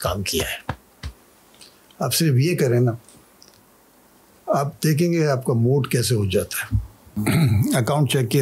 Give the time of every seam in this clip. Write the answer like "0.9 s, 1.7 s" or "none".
7.1 s